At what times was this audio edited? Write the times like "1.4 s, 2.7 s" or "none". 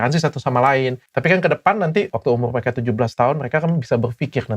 1.0 s, 2.1 s